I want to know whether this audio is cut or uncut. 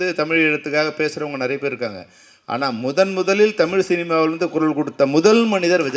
uncut